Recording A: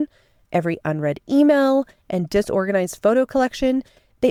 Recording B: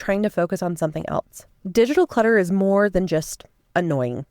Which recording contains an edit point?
B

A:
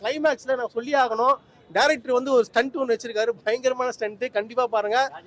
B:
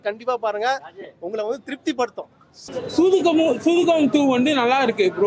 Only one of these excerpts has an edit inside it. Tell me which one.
B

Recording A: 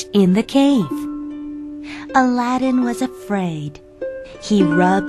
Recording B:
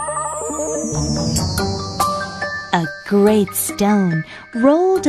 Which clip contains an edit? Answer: B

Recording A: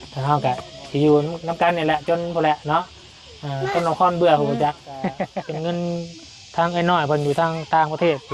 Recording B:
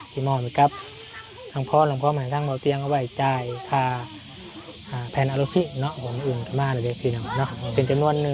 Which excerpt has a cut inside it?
A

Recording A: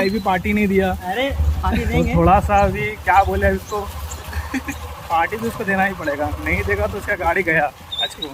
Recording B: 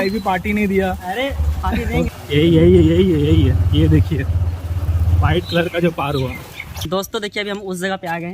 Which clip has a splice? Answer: B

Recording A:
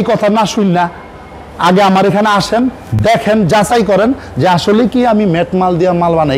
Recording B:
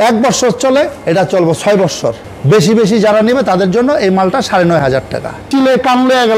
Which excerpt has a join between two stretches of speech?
B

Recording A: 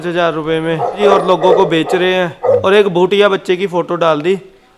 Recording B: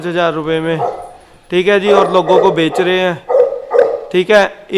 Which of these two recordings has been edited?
A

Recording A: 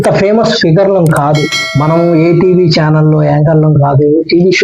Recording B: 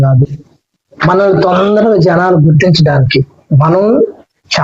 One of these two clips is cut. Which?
A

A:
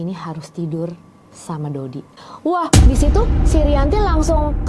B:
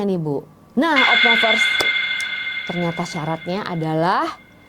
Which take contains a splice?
A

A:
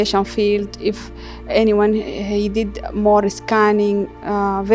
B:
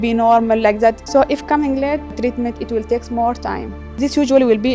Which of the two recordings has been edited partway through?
B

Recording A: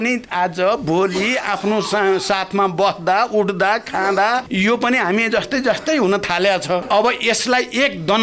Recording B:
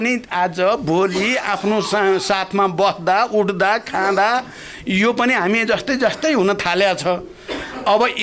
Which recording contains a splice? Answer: A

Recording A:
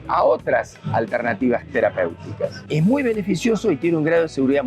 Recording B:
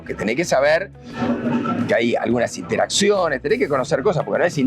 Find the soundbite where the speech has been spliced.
A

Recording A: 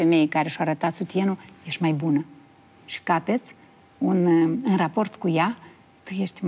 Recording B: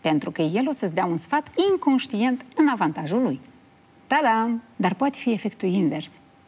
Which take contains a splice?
B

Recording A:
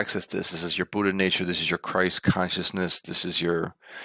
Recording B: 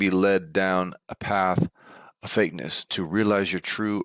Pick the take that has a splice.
B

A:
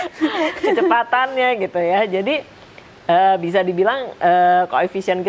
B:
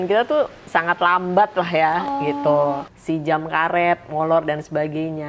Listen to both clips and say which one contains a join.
B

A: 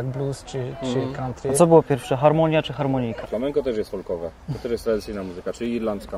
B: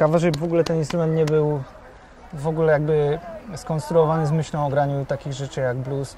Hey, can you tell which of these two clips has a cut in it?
A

